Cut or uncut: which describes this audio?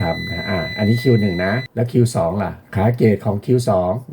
cut